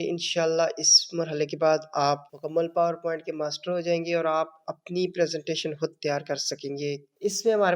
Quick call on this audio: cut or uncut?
uncut